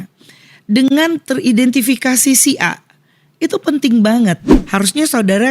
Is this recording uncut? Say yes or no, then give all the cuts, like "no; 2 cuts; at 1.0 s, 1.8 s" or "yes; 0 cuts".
no; 1 cut; at 4.5 s